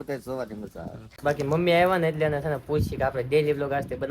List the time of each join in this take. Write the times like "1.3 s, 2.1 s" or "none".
1.1 s